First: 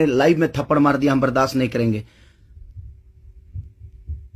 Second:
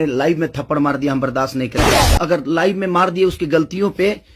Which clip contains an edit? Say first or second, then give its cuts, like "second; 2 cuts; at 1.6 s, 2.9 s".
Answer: second; 1 cut; at 2.1 s